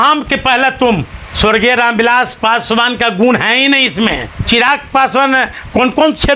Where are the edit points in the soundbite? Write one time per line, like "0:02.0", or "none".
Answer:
0:01.2
0:04.4